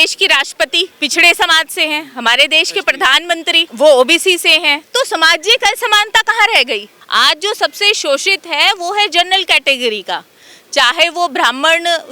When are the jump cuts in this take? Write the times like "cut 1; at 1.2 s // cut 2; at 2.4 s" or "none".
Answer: cut 1; at 0.9 s // cut 2; at 3.7 s // cut 3; at 6.9 s